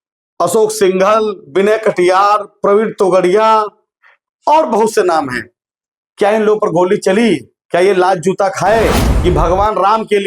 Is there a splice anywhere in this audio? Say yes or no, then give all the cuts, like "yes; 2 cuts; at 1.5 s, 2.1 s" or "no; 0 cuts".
yes; 1 cut; at 9.0 s